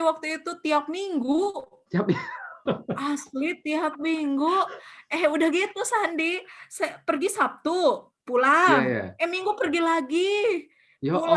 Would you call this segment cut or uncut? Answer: uncut